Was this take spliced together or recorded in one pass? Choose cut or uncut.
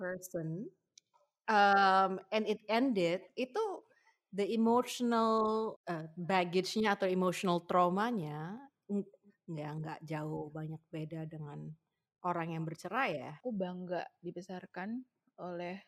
cut